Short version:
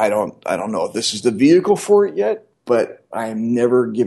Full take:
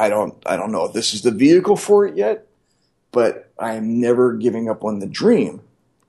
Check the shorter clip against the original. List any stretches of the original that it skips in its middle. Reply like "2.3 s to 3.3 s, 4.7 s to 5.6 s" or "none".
2.5 s to 3.0 s